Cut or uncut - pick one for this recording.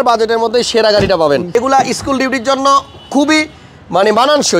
cut